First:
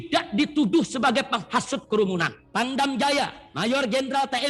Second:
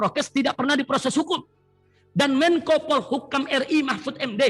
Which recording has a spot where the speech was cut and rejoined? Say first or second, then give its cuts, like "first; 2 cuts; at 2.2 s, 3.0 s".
first; 1 cut; at 2.4 s